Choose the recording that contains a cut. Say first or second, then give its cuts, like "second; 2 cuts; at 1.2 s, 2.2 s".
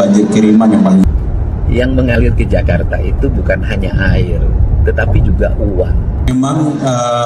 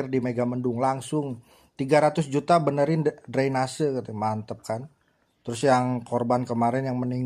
first; 2 cuts; at 1.0 s, 6.1 s